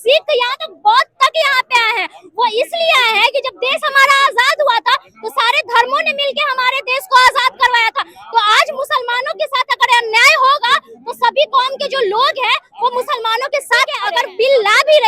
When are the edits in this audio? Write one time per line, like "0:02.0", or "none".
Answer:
0:14.0